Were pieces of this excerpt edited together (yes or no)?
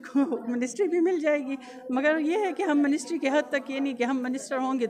no